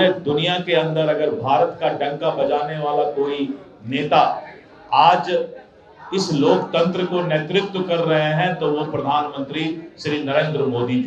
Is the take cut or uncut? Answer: uncut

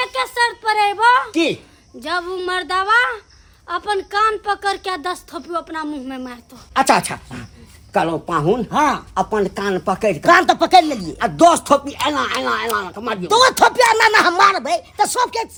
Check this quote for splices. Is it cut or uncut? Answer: uncut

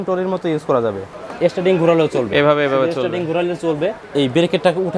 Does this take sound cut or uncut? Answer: cut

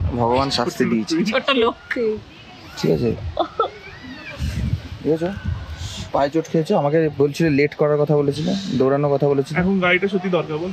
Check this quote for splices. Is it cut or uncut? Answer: uncut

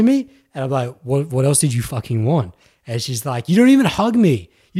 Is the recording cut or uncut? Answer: uncut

